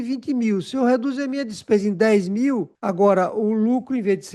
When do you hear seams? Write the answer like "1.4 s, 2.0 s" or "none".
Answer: 2.7 s